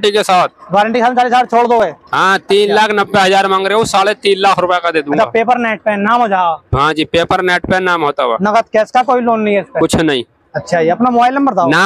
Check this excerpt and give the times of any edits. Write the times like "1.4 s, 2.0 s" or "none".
none